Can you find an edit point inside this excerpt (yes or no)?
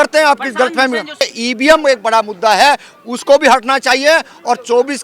yes